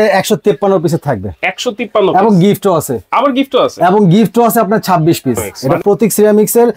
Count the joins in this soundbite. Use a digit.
1